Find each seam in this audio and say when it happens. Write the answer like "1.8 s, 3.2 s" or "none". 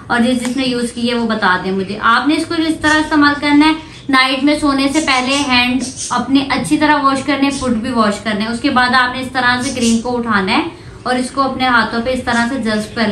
none